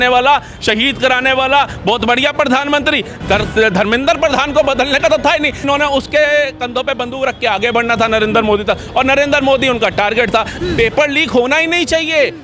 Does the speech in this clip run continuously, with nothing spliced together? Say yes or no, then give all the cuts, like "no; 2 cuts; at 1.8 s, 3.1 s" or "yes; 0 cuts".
no; 3 cuts; at 3.1 s, 5.6 s, 10.5 s